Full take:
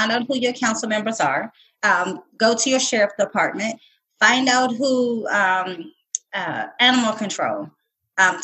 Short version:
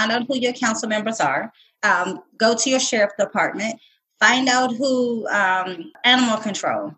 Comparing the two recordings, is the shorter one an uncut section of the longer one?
no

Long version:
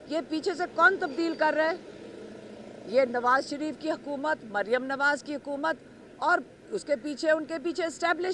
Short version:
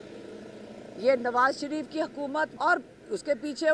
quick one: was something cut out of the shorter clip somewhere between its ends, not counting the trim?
yes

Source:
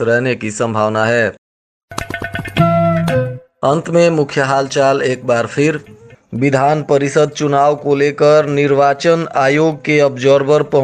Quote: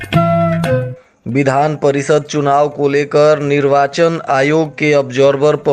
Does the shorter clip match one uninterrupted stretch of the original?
no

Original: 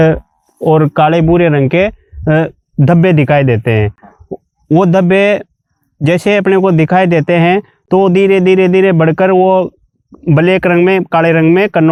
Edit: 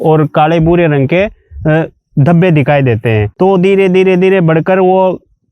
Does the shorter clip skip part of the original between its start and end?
yes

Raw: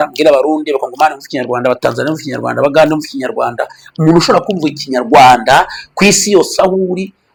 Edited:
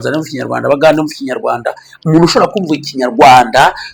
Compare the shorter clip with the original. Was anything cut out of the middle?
no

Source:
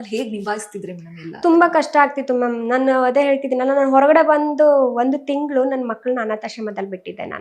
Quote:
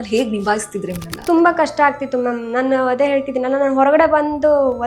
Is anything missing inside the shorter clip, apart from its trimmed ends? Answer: yes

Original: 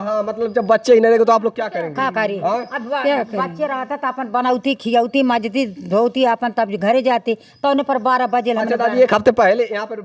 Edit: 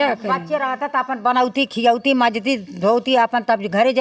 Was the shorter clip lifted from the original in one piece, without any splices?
yes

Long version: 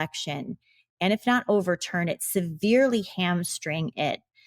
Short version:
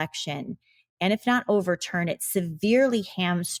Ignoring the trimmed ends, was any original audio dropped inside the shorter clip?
no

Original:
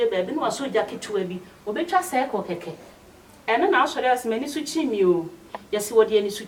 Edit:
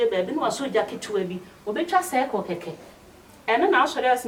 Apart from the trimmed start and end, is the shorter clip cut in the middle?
no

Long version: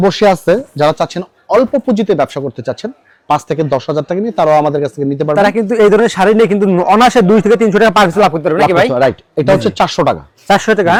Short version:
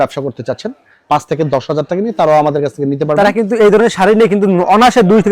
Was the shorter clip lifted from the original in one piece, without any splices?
yes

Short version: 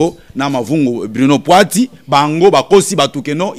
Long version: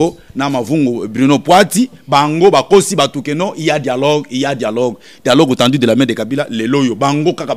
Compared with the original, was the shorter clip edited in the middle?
no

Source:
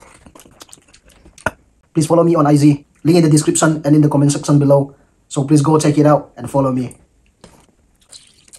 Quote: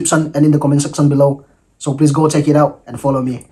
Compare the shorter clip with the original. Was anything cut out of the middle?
no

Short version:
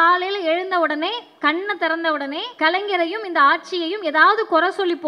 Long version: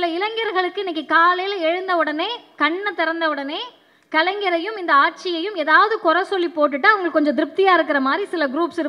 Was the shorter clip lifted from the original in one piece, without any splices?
no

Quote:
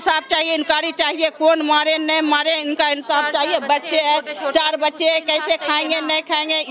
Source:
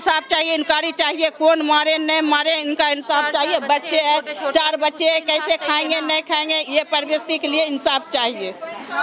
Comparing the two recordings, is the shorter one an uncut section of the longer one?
yes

